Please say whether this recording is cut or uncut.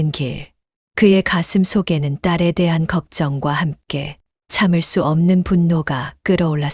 uncut